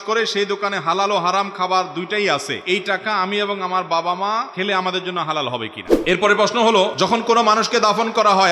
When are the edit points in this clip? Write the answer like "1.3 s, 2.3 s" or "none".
2.5 s, 4.5 s, 5.8 s, 6.9 s